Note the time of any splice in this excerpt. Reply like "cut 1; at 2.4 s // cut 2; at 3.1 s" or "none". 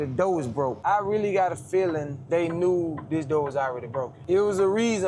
cut 1; at 0.8 s // cut 2; at 2.1 s // cut 3; at 4.2 s

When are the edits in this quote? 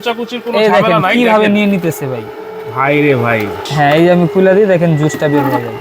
cut 1; at 3.6 s

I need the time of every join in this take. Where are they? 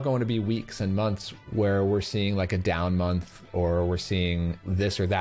cut 1; at 1.3 s

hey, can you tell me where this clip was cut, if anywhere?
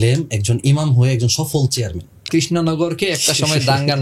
cut 1; at 2.2 s

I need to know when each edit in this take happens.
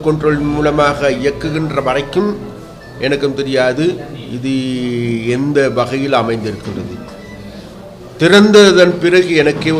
none

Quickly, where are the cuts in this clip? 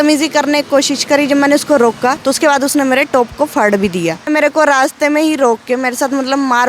cut 1; at 2.2 s // cut 2; at 4.3 s

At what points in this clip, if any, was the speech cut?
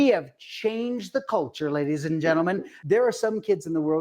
cut 1; at 2.7 s

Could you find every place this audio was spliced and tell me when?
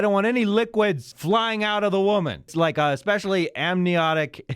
cut 1; at 1.1 s // cut 2; at 2.5 s

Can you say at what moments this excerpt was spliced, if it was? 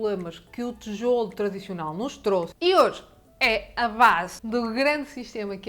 cut 1; at 2.5 s // cut 2; at 4.4 s

